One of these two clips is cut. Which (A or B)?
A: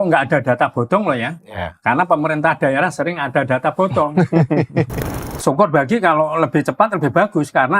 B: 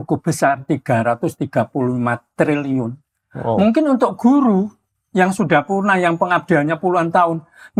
A